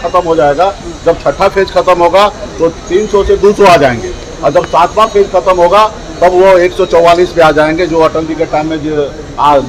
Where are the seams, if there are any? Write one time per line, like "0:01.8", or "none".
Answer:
none